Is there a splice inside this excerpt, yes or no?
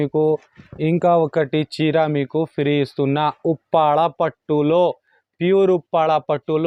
no